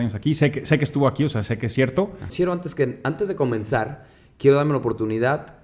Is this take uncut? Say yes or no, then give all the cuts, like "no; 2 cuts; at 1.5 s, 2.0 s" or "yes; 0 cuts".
no; 1 cut; at 2.3 s